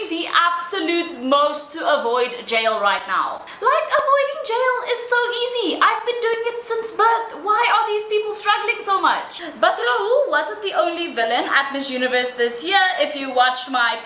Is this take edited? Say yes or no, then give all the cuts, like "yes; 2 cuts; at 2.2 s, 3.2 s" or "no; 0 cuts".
no; 0 cuts